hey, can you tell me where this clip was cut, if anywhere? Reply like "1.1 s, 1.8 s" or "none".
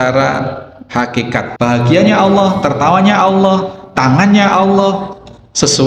1.5 s